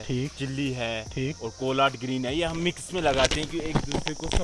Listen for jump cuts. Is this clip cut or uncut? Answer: uncut